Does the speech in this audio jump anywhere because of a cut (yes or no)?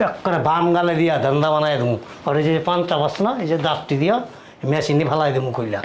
no